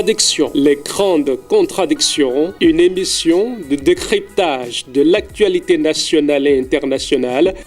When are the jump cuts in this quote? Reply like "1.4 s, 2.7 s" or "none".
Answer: 1.0 s